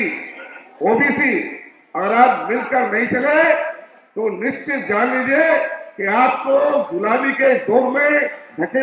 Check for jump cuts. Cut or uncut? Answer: uncut